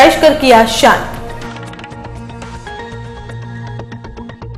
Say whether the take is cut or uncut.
uncut